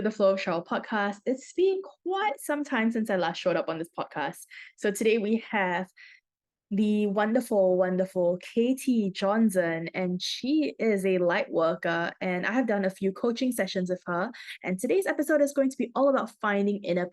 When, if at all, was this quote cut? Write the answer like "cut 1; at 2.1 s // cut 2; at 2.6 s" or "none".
none